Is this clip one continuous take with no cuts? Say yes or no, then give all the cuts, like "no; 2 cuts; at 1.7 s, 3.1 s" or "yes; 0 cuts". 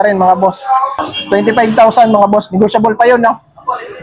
no; 1 cut; at 1.1 s